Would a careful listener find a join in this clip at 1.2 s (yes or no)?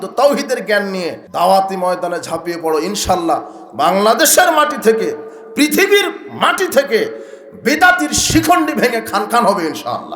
yes